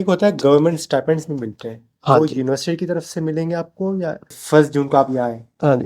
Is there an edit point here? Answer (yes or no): yes